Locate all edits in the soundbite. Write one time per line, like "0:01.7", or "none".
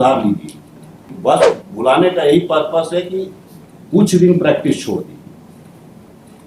0:01.1